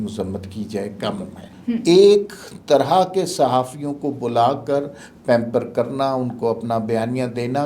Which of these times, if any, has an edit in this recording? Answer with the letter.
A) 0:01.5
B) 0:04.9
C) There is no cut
A